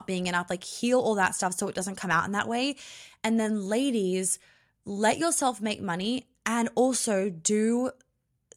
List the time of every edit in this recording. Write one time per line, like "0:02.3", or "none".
none